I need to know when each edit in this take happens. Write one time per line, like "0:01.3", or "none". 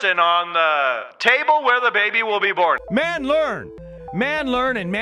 0:01.1
0:02.8